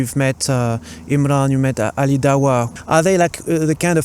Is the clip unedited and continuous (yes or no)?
no